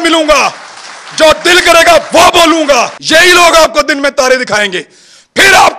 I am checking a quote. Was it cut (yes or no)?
yes